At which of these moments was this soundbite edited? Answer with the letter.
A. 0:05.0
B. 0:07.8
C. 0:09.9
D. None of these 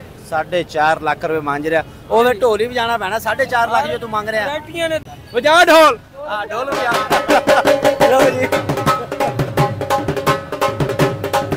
D